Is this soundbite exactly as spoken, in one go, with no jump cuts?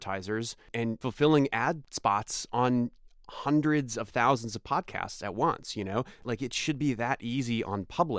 no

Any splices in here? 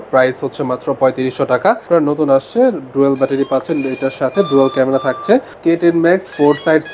yes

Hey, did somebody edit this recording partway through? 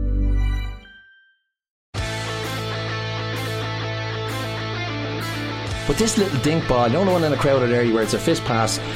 yes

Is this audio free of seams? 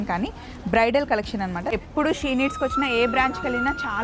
no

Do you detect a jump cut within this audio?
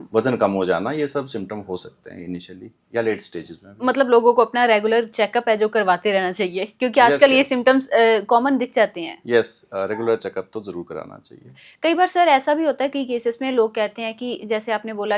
no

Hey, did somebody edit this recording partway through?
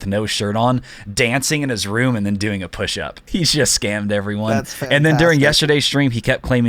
yes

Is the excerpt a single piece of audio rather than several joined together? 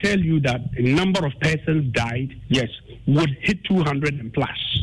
yes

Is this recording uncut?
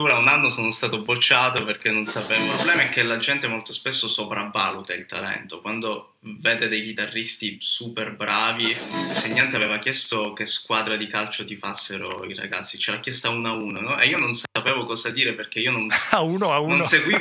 no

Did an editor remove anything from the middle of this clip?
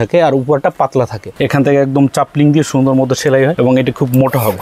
yes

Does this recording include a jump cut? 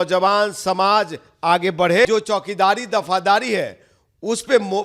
yes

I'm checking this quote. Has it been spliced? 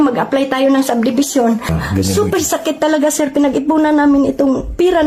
no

